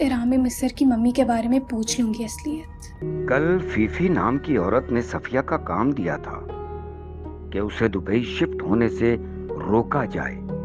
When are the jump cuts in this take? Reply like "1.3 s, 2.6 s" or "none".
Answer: 3.0 s